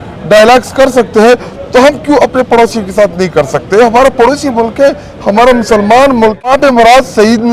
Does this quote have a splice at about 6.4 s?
yes; 1 cut; at 6.4 s

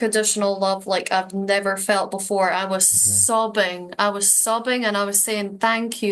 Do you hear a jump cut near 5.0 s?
no; 0 cuts

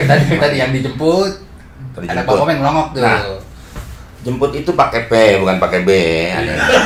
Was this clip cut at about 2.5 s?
no; 0 cuts

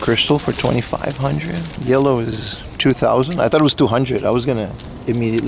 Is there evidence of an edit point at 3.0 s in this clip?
no; 1 cut; at 1.7 s

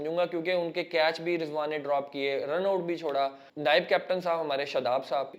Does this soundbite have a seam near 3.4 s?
yes; 1 cut; at 3.4 s

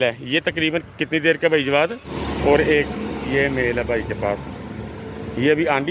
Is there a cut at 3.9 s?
no; 1 cut; at 2.1 s

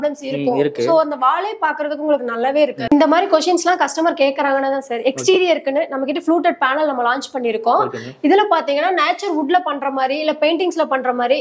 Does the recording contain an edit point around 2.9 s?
yes; 1 cut; at 2.9 s

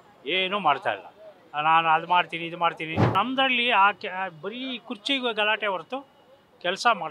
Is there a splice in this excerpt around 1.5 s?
no; 1 cut; at 3.1 s

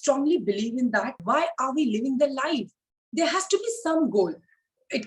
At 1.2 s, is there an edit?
yes; 1 cut; at 1.2 s

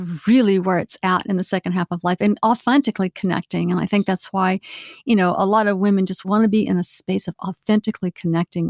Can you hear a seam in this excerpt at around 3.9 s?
no; 2 cuts; at 2.6 s, 6.3 s

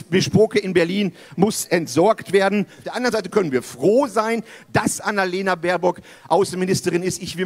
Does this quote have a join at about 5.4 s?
no; 1 cut; at 2.9 s

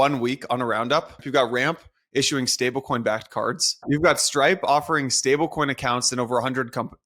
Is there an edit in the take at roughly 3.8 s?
yes; 2 cuts; at 1.2 s, 3.8 s

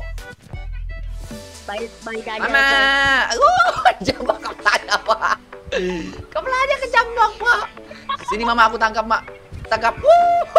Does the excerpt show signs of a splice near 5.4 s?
no; 1 cut; at 1.4 s

